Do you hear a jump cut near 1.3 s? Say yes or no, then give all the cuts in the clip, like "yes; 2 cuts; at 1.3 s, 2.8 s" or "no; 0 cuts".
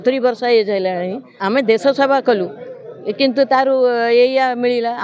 yes; 1 cut; at 1.3 s